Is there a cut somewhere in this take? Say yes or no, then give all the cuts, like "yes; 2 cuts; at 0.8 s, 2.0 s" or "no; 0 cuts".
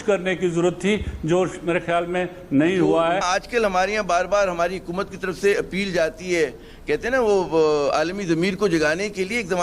yes; 1 cut; at 3.2 s